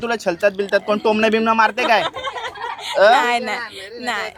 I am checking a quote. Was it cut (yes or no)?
no